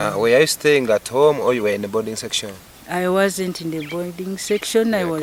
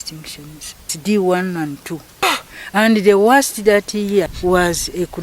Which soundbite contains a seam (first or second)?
second